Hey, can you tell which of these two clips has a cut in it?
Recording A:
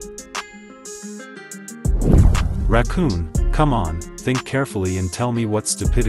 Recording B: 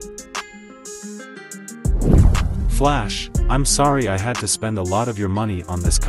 B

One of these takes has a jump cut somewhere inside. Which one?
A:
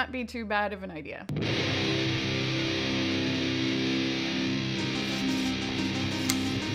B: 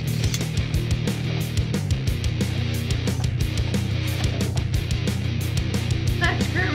A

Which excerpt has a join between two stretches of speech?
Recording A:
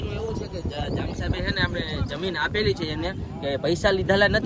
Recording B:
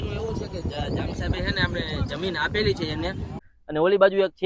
B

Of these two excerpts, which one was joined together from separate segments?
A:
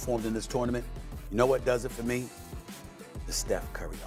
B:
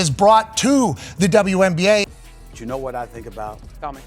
B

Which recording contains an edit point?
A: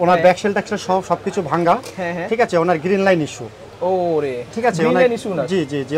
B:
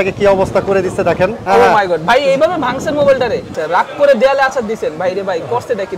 B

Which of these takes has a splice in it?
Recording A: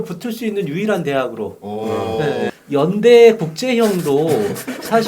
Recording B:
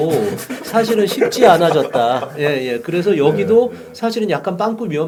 A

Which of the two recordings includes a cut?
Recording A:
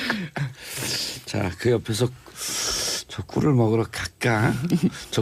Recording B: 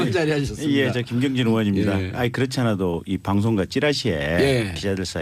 B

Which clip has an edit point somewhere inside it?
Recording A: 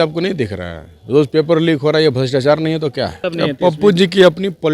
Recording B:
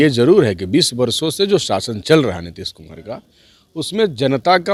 A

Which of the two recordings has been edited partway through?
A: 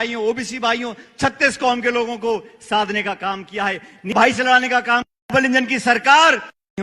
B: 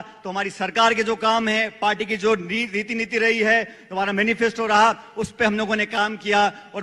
A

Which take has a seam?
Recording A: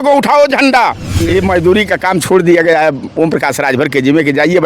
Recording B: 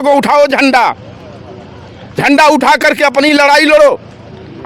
A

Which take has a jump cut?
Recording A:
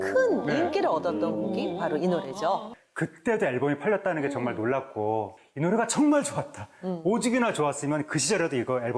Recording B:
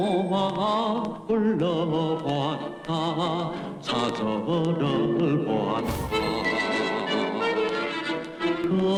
A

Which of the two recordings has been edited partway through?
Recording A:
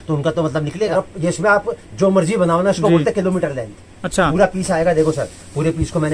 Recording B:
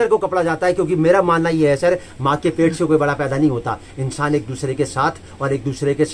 A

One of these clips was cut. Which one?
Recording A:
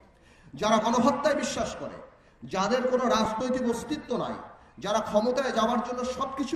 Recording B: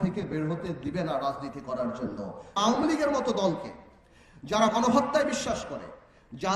B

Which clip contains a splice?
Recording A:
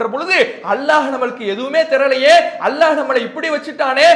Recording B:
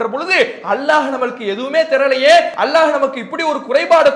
B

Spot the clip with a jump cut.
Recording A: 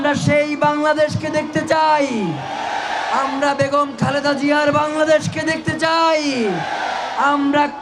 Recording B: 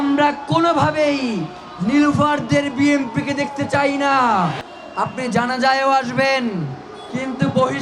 B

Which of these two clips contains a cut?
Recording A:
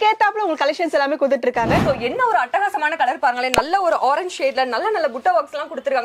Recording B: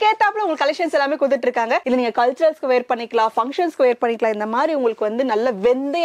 A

